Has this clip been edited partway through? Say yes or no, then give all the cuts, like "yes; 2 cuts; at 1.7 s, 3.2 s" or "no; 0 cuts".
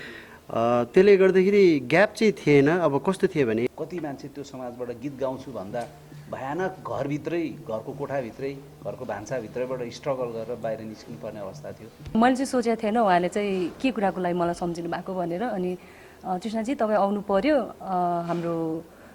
yes; 2 cuts; at 3.7 s, 12.1 s